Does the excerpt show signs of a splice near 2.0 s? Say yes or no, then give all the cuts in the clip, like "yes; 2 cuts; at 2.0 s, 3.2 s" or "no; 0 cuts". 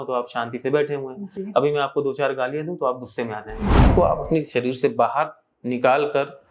no; 1 cut; at 3.9 s